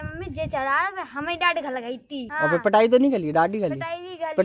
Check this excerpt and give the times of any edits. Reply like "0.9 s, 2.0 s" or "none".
2.3 s

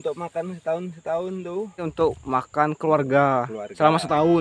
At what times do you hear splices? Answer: 1.9 s

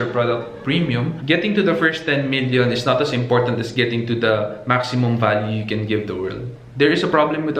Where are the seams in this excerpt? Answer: 1.1 s

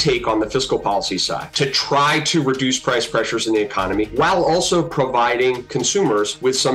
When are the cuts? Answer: 1.5 s, 4.1 s, 6.0 s

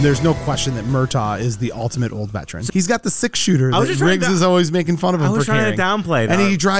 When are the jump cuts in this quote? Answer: 2.6 s

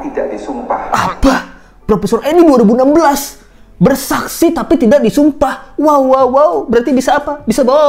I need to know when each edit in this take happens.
none

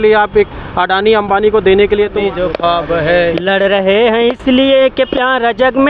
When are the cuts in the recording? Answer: 2.2 s

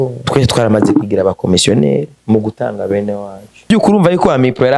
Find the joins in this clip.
3.7 s

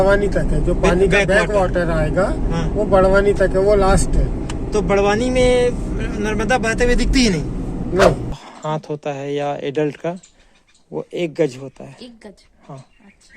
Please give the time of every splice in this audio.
8.4 s

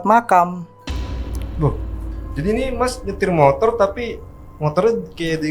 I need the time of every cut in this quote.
none

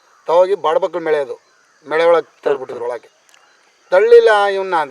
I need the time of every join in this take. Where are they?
none

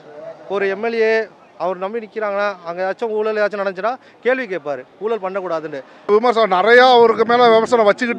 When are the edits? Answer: 6.1 s

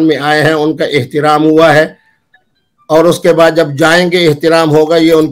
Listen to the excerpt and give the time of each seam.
none

